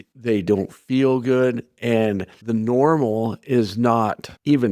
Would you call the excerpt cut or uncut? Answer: uncut